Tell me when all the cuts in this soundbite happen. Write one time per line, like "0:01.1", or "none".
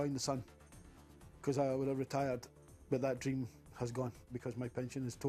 0:04.4